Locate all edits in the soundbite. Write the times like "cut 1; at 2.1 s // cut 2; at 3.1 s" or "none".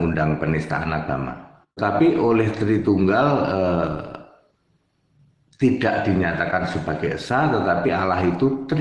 cut 1; at 1.8 s

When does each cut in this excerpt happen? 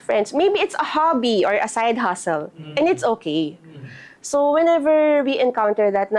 none

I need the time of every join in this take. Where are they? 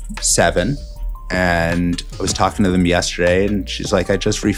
none

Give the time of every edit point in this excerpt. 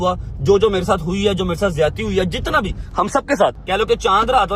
cut 1; at 3.6 s

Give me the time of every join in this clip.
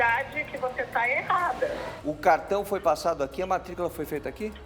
cut 1; at 1.9 s

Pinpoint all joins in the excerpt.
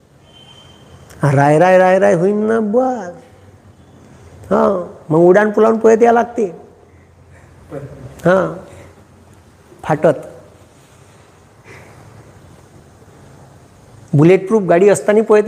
none

